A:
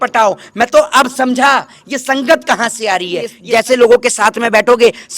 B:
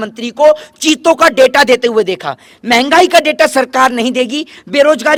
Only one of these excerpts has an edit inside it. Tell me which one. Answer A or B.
A